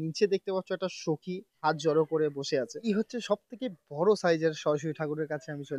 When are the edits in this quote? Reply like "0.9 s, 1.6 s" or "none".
1.6 s, 2.8 s